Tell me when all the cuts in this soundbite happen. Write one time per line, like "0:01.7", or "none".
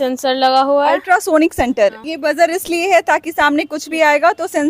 0:02.1